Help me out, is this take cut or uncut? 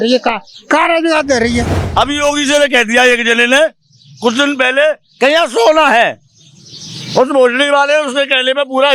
cut